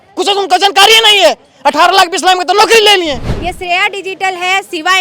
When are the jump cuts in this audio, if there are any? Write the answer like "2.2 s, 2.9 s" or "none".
3.3 s